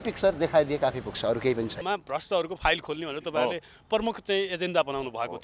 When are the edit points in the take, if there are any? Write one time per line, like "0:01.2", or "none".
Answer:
0:01.8